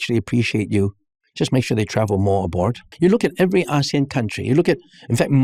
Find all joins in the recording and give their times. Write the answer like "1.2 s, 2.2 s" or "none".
2.8 s